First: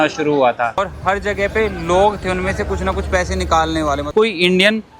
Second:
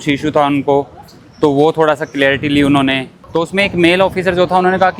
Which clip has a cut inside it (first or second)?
first